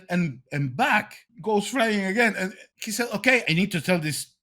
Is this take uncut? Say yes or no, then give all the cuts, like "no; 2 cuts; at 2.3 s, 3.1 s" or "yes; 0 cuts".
no; 3 cuts; at 1.2 s, 2.7 s, 3.4 s